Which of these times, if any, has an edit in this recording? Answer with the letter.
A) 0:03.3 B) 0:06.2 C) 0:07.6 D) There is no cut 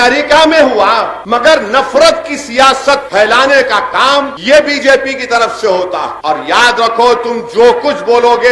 B